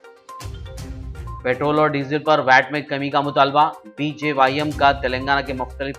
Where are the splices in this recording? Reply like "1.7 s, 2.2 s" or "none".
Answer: 1.0 s